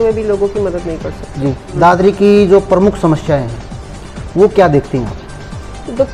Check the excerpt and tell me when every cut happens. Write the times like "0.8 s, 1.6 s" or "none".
1.7 s